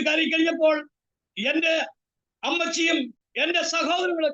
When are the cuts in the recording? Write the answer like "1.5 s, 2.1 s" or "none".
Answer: 3.2 s